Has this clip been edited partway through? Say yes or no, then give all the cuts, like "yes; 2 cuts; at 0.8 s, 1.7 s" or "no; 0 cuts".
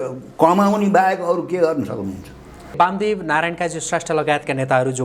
yes; 1 cut; at 2.8 s